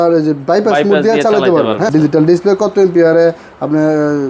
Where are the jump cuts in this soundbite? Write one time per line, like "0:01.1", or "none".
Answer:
0:01.9